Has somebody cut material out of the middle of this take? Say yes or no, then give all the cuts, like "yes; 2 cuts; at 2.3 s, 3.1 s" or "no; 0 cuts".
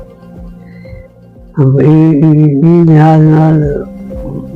yes; 1 cut; at 1.6 s